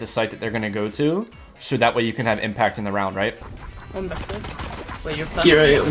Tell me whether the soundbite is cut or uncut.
cut